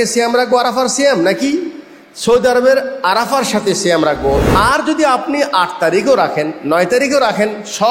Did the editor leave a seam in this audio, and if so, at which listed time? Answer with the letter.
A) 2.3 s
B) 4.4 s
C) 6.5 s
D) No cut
B